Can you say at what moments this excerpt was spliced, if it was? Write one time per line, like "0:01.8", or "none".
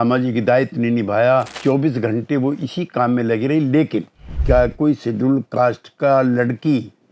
0:01.5
0:04.4

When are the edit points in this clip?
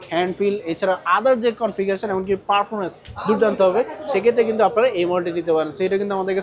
none

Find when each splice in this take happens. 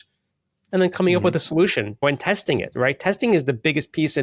0:02.0

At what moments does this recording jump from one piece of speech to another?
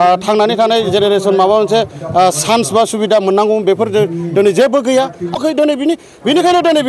0:05.5

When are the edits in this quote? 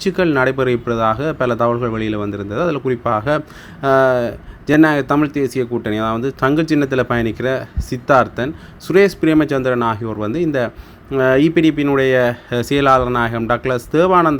none

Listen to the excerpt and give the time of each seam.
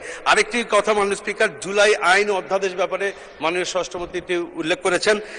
none

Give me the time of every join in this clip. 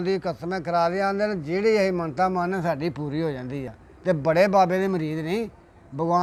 none

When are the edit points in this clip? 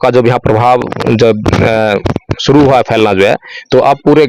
none

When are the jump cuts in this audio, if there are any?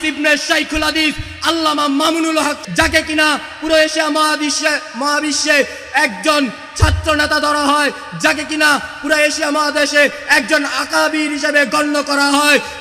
0:02.6

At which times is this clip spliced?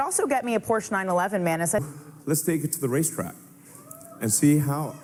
none

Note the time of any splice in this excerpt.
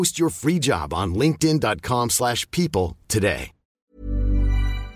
0:03.7

